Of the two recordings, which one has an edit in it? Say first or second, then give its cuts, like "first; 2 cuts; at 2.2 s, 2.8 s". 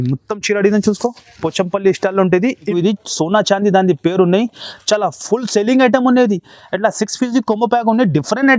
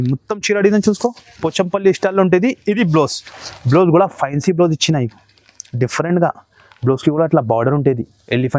first; 1 cut; at 2.8 s